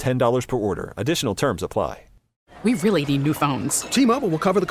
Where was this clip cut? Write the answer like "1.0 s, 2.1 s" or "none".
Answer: 2.3 s